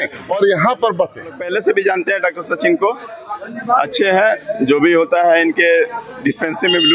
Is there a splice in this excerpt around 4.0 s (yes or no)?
no